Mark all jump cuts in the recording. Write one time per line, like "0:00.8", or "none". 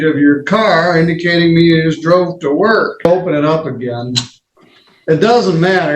0:03.0